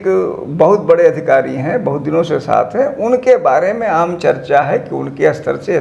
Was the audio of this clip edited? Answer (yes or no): no